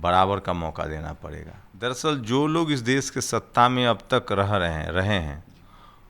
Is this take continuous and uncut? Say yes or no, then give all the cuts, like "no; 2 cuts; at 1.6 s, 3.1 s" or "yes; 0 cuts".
no; 1 cut; at 1.9 s